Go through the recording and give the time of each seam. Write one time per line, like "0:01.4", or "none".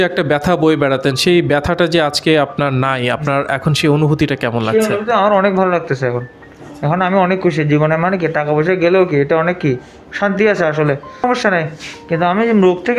0:11.2